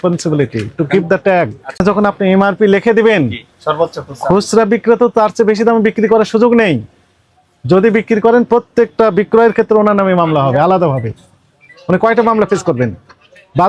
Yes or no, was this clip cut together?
yes